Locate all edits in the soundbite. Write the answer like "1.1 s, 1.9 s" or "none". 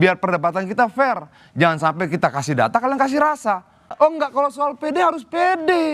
3.8 s